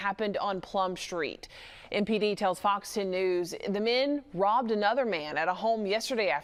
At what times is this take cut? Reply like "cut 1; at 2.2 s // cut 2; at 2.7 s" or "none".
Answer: none